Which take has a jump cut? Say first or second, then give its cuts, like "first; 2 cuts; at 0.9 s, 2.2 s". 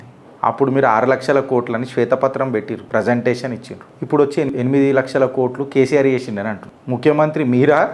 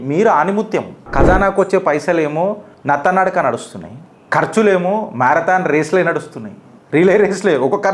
second; 1 cut; at 1.1 s